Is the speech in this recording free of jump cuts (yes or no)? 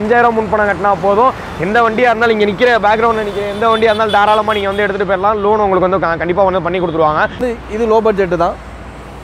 no